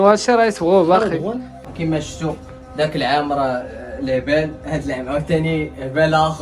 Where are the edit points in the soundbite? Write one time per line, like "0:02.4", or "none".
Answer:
0:01.5